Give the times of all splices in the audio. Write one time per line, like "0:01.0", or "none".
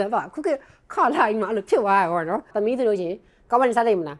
0:02.5